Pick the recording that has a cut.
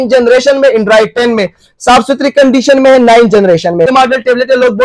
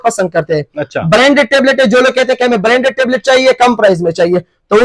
first; 1 cut; at 3.9 s

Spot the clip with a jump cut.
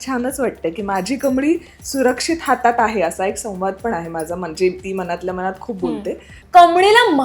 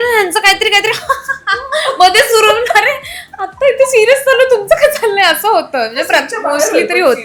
first; 1 cut; at 6.3 s

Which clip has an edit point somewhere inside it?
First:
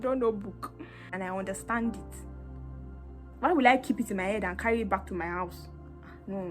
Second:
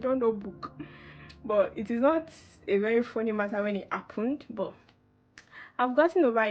first; 1 cut; at 1.1 s

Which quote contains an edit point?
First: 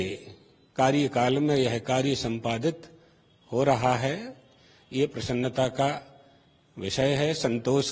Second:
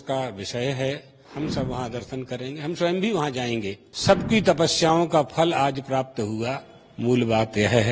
second; 2 cuts; at 1.2 s, 3.8 s

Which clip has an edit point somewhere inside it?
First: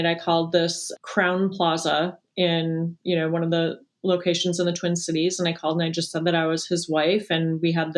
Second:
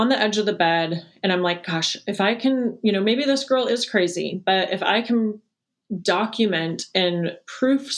second; 1 cut; at 5.5 s

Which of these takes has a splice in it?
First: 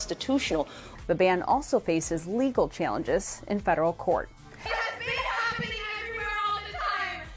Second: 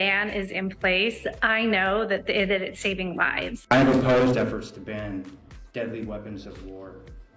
first; 2 cuts; at 0.9 s, 4.8 s

